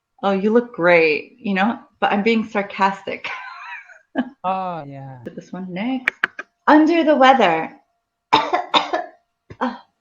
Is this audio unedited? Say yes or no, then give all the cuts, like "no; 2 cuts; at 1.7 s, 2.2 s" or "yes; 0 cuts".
no; 1 cut; at 5.3 s